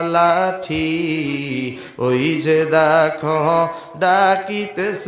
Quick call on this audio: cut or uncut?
uncut